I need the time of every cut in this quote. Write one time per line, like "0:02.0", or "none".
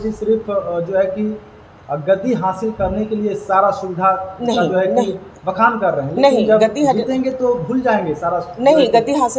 none